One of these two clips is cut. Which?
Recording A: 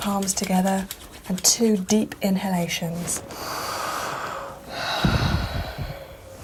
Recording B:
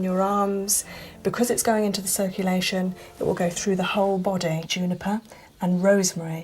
B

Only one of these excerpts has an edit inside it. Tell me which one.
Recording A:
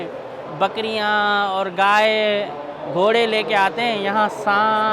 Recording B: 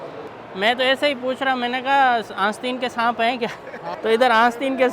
B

